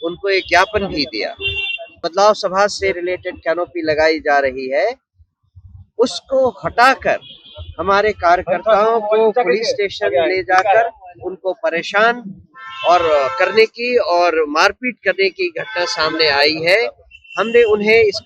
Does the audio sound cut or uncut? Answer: cut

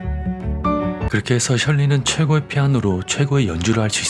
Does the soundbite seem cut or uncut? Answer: cut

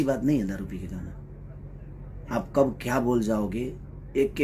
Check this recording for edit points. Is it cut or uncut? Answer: uncut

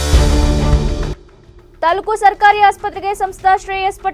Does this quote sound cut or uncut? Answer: cut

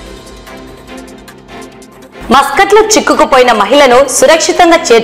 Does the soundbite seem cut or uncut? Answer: uncut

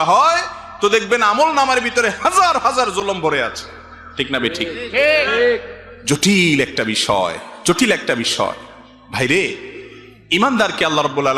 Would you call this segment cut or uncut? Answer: uncut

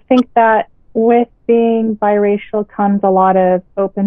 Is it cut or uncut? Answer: uncut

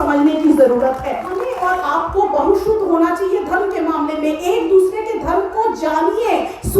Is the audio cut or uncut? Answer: cut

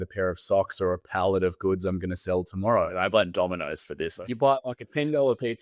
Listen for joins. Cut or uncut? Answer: cut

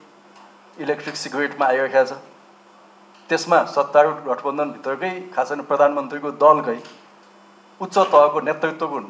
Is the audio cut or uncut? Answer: uncut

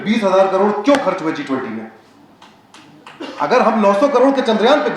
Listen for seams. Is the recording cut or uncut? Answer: uncut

